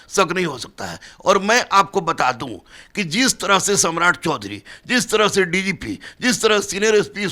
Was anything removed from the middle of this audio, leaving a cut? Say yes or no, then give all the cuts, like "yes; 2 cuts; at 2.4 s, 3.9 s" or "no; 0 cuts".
no; 0 cuts